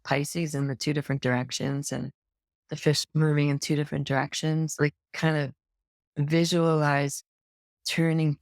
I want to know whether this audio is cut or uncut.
cut